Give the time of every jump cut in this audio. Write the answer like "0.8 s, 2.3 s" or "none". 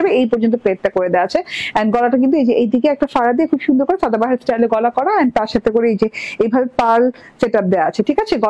none